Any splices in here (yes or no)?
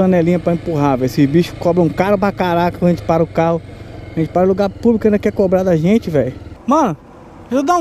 yes